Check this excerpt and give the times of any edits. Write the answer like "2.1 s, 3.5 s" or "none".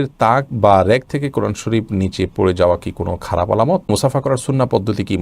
3.9 s